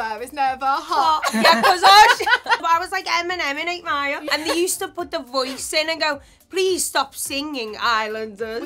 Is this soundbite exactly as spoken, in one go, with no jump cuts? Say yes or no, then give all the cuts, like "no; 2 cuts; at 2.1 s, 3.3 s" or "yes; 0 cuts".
no; 2 cuts; at 2.6 s, 4.3 s